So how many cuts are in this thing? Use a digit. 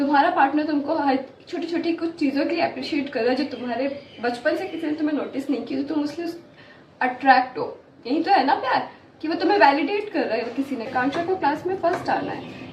1